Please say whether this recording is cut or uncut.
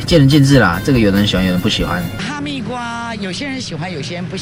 uncut